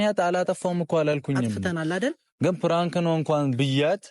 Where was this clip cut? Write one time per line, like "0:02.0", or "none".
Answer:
none